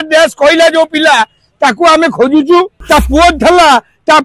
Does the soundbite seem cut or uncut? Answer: cut